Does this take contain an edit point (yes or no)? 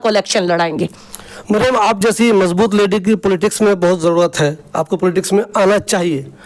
no